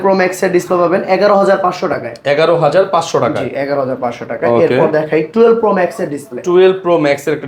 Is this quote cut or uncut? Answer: uncut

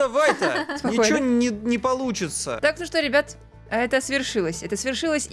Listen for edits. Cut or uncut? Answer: cut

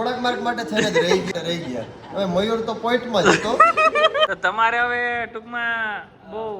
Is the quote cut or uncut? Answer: cut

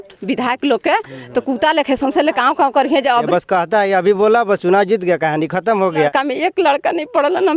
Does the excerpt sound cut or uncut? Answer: cut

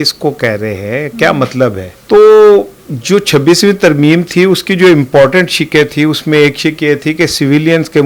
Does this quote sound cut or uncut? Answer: uncut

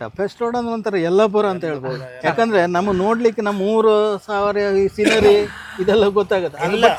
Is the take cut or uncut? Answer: uncut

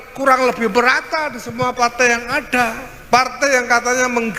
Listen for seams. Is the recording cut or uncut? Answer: cut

